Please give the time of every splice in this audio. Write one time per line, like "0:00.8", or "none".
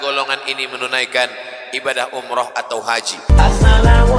0:03.2

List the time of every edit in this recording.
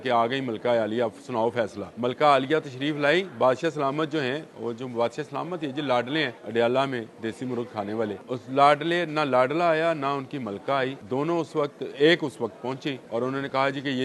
0:01.8
0:06.4
0:08.2
0:11.0
0:13.0

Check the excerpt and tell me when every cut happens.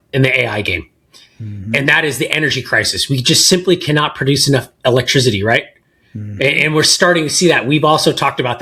none

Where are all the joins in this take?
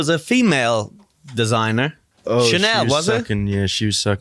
0:02.1

